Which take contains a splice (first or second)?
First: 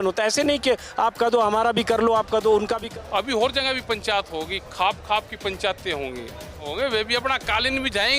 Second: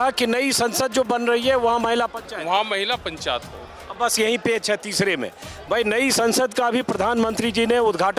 first